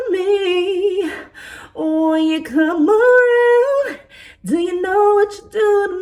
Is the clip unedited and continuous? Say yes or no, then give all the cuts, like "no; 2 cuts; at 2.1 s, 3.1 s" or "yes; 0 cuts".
yes; 0 cuts